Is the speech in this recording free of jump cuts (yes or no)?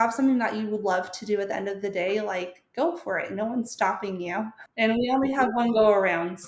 no